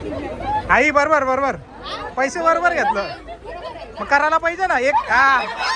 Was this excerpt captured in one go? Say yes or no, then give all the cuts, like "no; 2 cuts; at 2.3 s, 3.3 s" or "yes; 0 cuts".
yes; 0 cuts